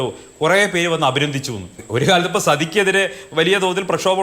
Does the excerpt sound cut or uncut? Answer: cut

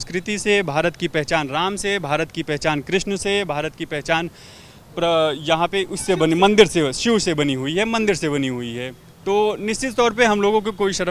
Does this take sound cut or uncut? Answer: uncut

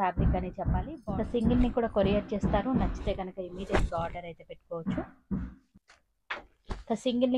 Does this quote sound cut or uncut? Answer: cut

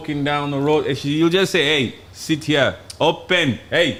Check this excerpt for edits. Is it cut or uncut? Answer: uncut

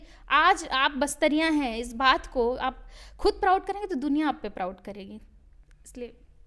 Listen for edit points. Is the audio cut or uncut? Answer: uncut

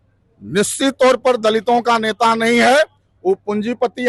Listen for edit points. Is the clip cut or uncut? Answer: uncut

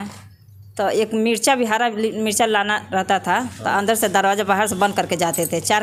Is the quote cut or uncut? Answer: uncut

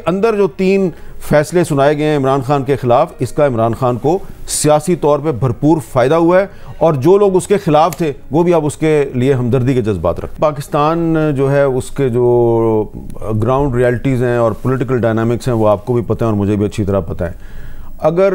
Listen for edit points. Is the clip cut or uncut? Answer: uncut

